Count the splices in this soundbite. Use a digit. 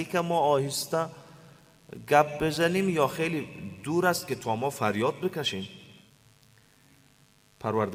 0